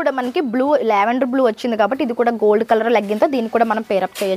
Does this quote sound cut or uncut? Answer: uncut